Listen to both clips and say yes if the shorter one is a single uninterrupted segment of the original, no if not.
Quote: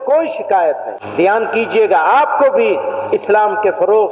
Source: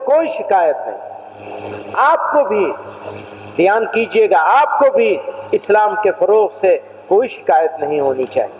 no